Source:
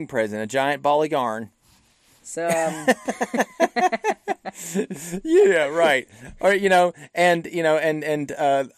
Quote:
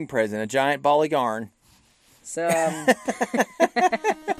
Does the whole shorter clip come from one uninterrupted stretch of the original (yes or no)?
yes